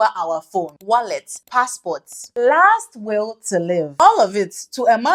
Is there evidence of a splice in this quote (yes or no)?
no